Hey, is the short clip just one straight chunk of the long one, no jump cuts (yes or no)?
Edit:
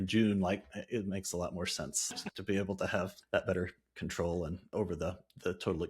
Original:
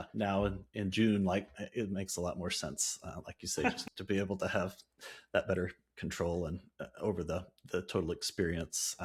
no